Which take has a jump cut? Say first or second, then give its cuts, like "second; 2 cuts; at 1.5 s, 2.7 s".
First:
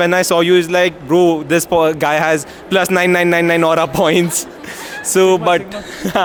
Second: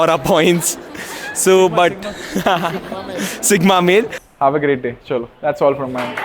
second; 1 cut; at 4.2 s